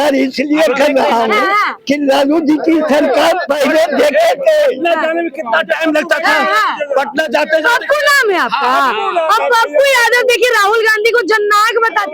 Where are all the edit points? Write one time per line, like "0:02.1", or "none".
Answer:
none